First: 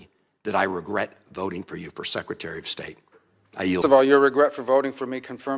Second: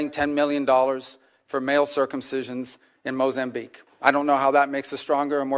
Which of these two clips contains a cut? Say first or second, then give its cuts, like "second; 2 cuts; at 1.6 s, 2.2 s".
first; 1 cut; at 3.8 s